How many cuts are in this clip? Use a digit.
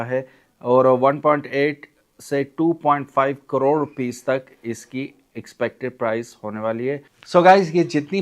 1